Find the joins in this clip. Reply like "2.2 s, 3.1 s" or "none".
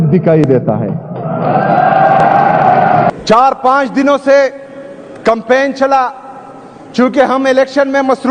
3.1 s